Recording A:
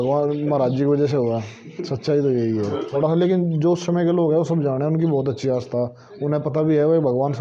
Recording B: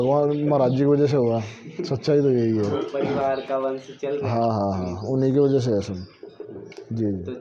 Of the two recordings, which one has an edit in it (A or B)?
A